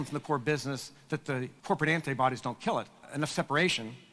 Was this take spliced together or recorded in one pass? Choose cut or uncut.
cut